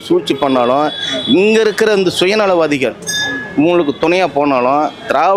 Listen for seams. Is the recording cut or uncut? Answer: uncut